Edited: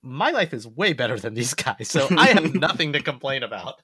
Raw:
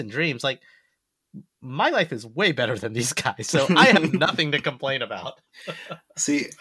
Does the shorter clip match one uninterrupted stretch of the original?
yes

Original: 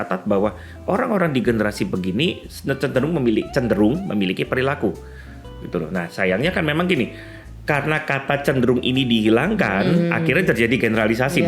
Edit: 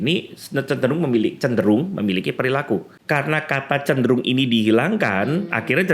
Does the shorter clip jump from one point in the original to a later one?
yes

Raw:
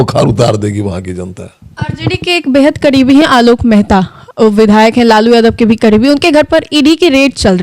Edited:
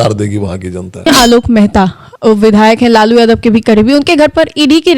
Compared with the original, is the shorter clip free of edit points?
no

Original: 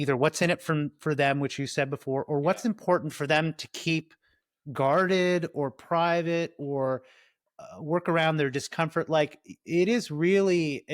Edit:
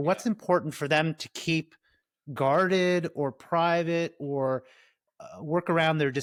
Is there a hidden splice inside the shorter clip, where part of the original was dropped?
no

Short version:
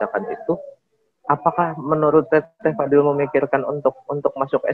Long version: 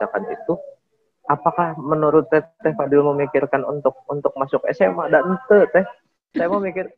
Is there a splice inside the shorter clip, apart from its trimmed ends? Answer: no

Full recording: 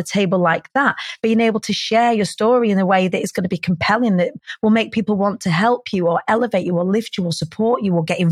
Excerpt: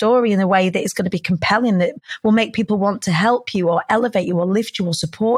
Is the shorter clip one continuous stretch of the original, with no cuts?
yes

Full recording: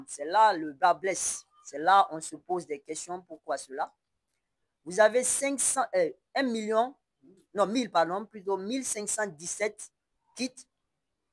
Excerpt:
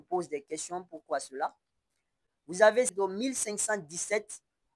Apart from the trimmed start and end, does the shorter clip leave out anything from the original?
yes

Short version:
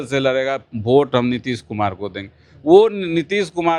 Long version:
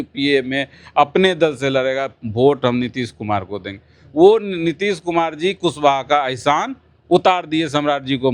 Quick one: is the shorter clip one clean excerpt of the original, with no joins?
yes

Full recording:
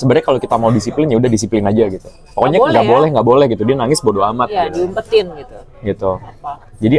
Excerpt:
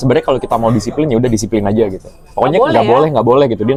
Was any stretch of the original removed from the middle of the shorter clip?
no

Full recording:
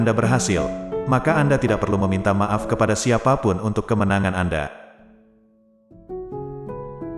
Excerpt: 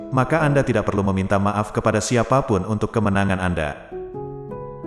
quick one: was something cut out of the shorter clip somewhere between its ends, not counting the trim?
yes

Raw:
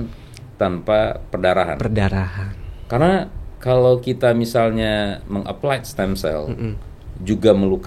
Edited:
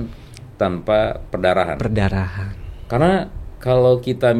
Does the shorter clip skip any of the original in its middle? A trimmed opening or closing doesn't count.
no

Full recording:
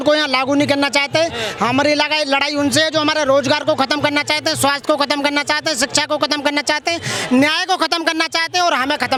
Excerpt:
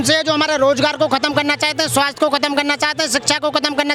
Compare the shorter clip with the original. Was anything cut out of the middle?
no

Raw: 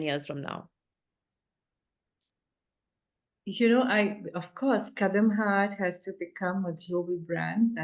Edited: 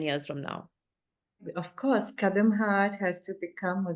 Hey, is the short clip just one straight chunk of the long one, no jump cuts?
no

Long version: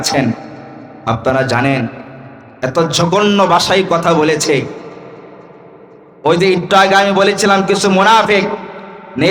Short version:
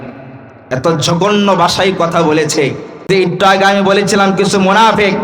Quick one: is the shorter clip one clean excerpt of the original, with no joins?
no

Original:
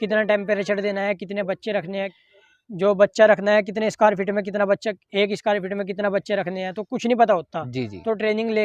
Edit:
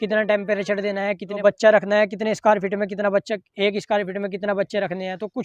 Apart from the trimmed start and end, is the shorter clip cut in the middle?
yes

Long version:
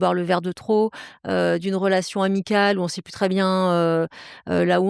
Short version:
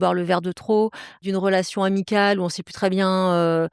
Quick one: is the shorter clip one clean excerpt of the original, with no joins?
no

